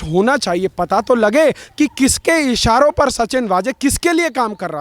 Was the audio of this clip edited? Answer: no; 0 cuts

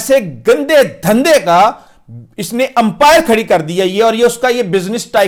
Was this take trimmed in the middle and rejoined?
no; 0 cuts

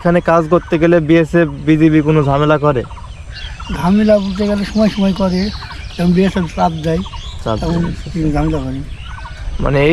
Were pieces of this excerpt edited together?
no; 0 cuts

